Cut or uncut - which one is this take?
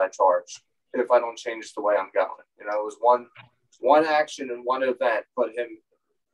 uncut